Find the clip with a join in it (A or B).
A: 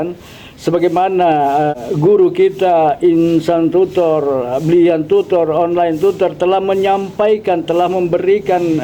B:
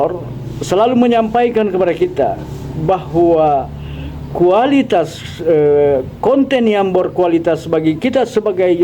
A